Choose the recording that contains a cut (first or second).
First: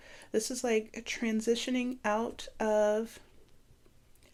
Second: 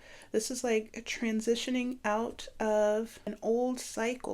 second